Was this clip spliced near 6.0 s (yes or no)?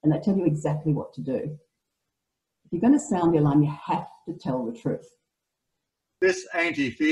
yes